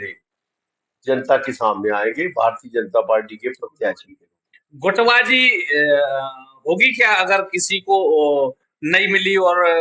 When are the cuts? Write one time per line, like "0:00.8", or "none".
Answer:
none

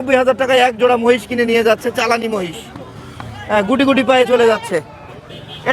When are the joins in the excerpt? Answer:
none

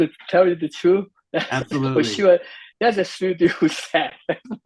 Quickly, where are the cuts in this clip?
0:03.1

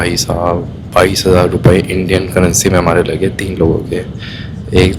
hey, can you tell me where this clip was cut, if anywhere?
none

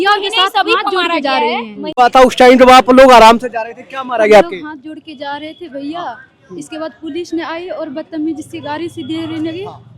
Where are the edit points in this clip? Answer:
0:01.9

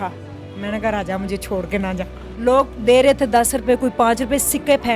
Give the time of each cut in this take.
0:02.2

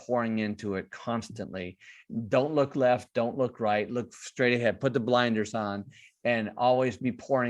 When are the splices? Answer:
0:02.1

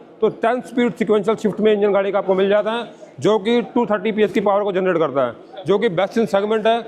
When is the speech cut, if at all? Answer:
none

